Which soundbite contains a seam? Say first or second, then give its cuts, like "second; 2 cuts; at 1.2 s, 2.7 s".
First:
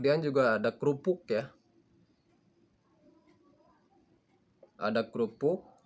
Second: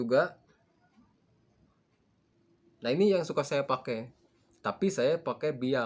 second; 1 cut; at 2.6 s